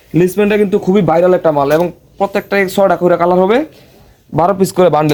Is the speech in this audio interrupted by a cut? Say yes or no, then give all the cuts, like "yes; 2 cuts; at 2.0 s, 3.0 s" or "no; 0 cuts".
no; 0 cuts